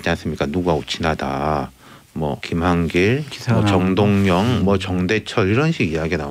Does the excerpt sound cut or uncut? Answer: cut